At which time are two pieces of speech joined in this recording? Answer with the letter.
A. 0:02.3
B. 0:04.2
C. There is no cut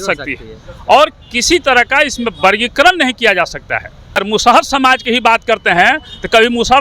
B